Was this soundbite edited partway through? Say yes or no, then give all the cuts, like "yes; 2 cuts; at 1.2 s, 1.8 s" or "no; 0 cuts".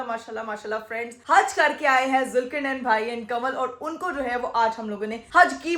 no; 0 cuts